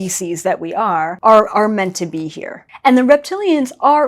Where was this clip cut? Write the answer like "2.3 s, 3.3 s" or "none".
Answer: 1.1 s, 2.7 s